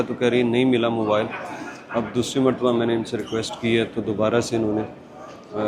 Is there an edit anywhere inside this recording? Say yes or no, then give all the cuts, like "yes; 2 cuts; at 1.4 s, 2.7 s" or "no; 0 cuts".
no; 0 cuts